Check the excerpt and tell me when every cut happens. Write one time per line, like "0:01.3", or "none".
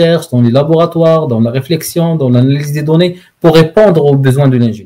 none